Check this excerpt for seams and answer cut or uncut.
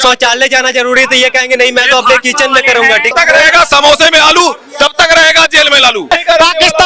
cut